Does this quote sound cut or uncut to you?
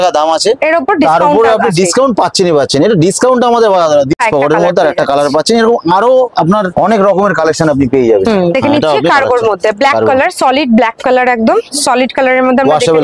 uncut